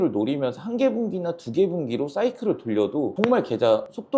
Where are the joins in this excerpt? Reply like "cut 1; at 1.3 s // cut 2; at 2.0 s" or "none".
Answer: cut 1; at 3.1 s